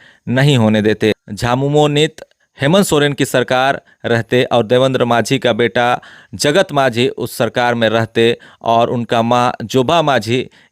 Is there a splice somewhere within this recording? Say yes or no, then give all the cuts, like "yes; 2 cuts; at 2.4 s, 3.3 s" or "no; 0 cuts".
yes; 1 cut; at 1.3 s